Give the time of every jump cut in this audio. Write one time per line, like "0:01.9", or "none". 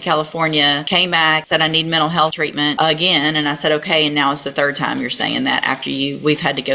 0:01.3
0:02.4